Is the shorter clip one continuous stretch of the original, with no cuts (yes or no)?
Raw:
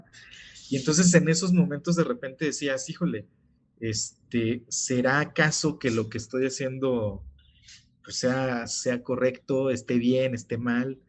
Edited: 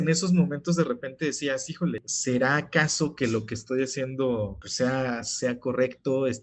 no